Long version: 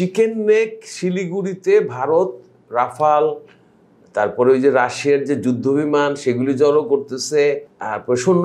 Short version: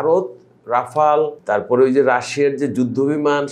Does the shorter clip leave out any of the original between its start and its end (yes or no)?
yes